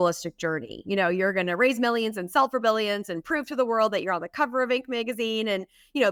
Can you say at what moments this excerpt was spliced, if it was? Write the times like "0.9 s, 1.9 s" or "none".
none

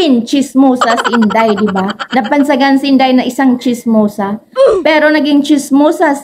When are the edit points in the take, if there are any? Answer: none

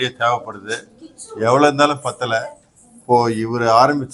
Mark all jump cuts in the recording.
none

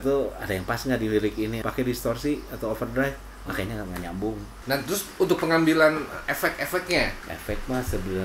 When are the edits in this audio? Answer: 1.6 s, 4.5 s, 7.3 s

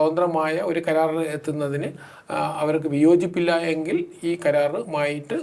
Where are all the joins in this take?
none

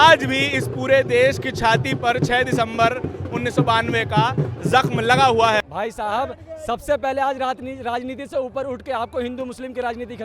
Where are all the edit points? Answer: 5.6 s

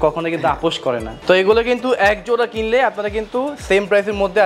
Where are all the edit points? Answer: 1.1 s

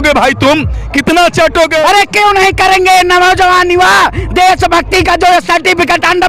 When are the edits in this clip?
1.8 s

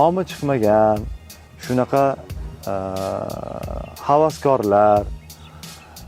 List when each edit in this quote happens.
none

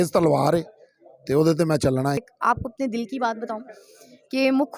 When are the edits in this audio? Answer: 2.2 s

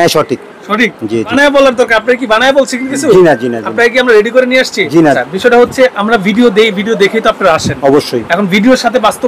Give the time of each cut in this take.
1.3 s, 5.2 s

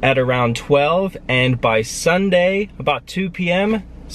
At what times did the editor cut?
none

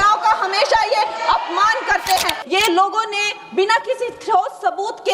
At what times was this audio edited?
2.4 s

